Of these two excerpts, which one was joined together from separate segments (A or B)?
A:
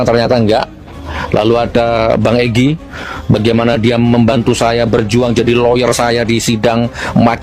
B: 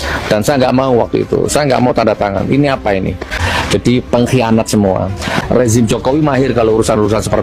B